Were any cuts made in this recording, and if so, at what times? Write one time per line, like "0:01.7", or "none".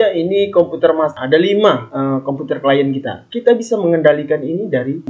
0:01.2